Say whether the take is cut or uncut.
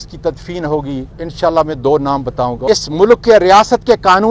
cut